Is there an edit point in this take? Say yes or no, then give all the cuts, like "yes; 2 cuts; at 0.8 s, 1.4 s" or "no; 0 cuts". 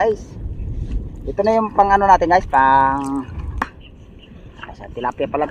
yes; 1 cut; at 3.8 s